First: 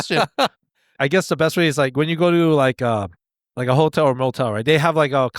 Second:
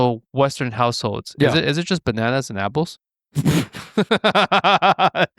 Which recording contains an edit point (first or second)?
first